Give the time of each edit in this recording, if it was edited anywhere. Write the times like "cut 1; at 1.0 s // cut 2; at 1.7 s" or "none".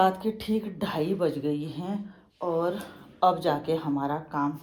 none